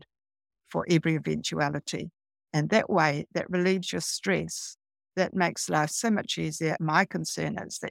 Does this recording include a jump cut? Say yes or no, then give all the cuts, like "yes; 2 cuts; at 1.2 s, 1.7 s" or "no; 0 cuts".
yes; 1 cut; at 6.8 s